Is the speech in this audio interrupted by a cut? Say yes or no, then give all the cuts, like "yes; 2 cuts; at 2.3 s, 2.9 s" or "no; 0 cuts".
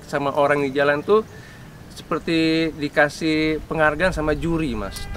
no; 0 cuts